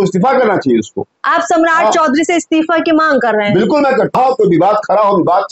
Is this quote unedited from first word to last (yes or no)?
no